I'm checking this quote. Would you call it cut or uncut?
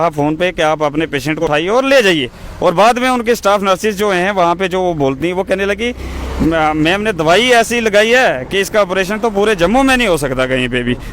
cut